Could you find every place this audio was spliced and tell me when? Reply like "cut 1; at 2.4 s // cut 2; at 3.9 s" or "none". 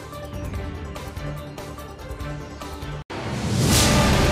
cut 1; at 1.7 s // cut 2; at 3.0 s